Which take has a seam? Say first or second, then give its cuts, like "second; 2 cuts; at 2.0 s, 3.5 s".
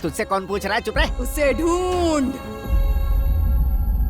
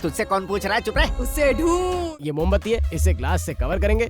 second; 1 cut; at 2.0 s